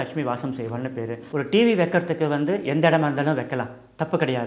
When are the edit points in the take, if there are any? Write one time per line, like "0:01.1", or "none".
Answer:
0:01.2